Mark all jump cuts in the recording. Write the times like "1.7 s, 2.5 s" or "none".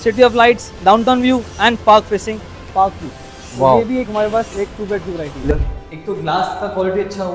5.5 s